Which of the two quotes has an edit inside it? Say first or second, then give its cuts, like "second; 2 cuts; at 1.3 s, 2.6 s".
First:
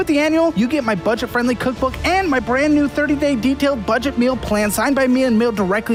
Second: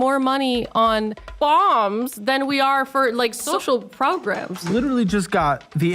second; 3 cuts; at 1.2 s, 3.4 s, 4.7 s